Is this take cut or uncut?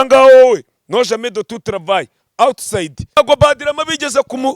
cut